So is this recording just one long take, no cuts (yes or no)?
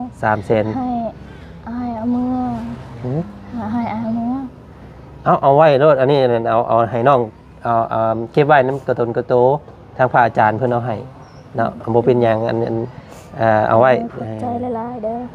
yes